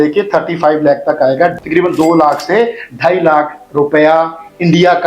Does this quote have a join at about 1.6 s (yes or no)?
yes